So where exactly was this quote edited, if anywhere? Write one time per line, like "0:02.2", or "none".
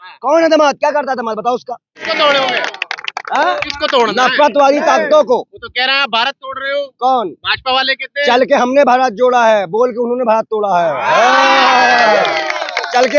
0:02.1